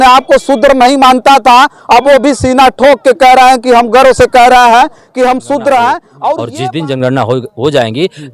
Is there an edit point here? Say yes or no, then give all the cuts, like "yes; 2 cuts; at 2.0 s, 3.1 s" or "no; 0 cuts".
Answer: yes; 1 cut; at 6.4 s